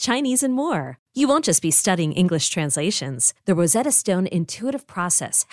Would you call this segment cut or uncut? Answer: uncut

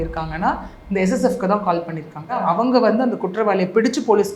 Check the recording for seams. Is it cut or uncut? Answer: cut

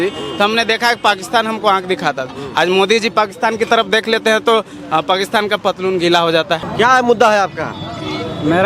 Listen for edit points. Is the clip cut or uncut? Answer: cut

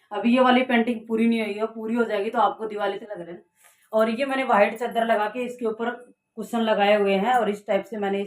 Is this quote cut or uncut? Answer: cut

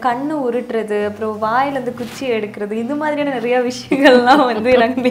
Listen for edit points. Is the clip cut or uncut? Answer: uncut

